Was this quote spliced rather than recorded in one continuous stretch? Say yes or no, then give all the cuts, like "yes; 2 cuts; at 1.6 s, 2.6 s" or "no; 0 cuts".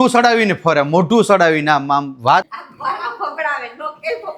yes; 1 cut; at 2.6 s